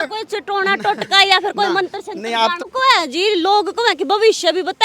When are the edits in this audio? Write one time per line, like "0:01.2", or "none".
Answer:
0:02.6

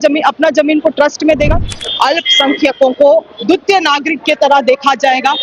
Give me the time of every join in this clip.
0:01.6

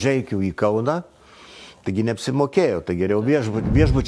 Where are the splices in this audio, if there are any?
none

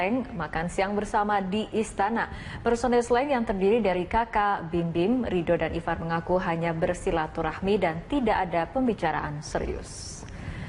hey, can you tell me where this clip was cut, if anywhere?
none

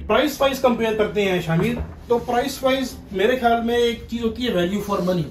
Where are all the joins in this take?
none

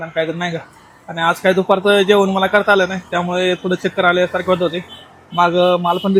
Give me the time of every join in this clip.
none

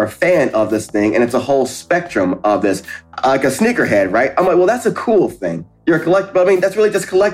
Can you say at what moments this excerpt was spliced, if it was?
0:03.0

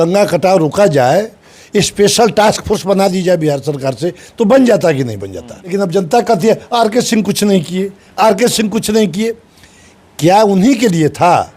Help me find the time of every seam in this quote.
0:05.5

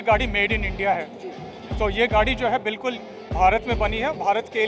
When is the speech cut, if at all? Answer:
none

